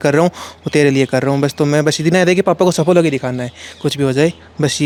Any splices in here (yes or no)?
no